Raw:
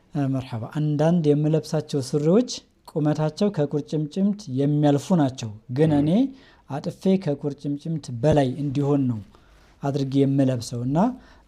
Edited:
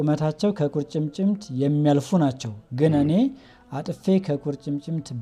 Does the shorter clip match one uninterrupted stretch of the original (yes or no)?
yes